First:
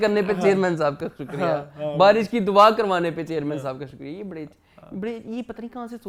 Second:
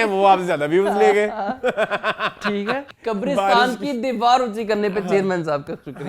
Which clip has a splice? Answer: second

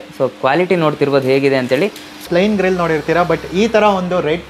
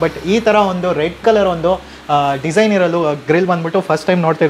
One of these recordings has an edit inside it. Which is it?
first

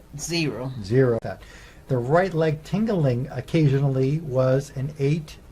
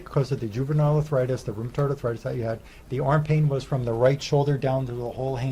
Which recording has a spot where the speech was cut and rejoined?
first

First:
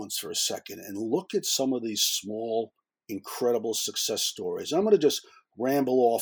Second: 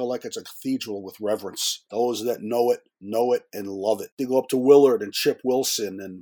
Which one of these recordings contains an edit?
second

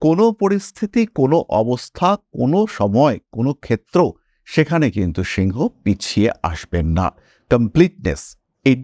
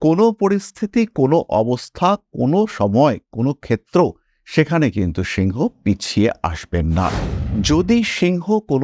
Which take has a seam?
second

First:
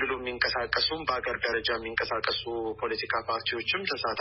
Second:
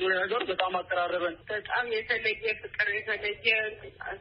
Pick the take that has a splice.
second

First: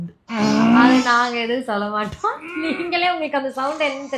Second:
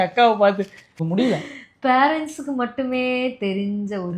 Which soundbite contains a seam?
second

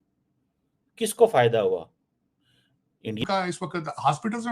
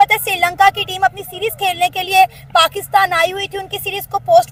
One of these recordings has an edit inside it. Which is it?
first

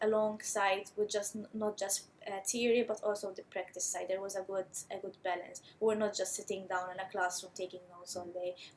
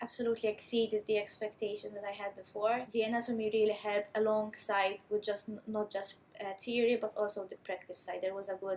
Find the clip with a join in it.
second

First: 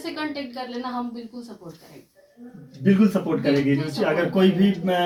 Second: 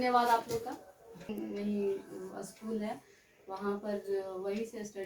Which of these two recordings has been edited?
second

